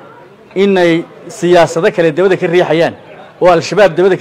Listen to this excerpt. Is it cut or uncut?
uncut